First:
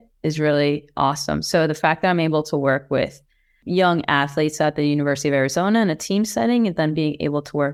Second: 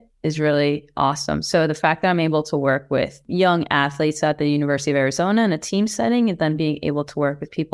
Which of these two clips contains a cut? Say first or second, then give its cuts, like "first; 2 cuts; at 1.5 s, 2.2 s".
second; 1 cut; at 3.2 s